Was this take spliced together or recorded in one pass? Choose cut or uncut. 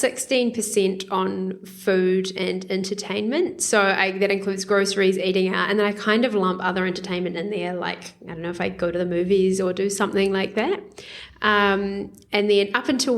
uncut